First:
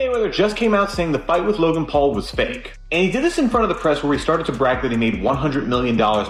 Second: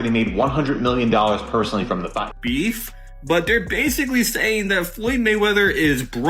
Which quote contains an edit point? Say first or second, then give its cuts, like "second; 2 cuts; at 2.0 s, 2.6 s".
second; 1 cut; at 2.4 s